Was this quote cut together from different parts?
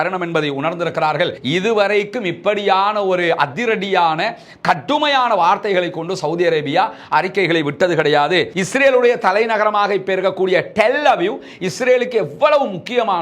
yes; 2 cuts; at 1.4 s, 8.6 s

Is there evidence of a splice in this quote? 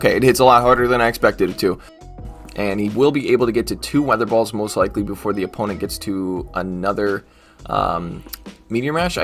yes; 1 cut; at 2.2 s

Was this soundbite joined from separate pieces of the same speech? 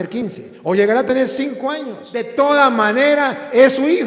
yes; 1 cut; at 2.3 s

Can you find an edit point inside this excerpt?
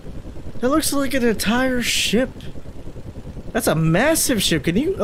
no; 0 cuts

